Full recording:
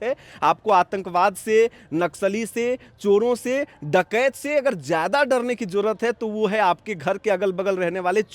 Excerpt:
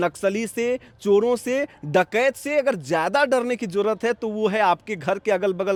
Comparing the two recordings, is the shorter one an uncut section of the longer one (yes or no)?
yes